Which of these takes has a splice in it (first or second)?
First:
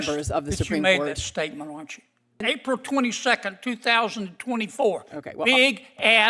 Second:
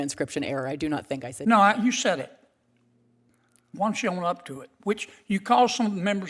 first